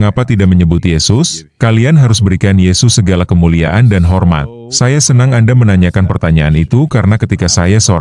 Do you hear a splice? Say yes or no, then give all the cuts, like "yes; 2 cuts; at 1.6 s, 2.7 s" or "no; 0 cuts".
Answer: yes; 1 cut; at 4.5 s